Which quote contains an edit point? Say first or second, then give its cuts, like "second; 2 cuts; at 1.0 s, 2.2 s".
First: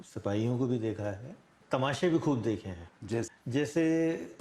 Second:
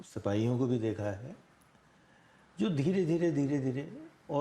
first; 2 cuts; at 1.5 s, 3.3 s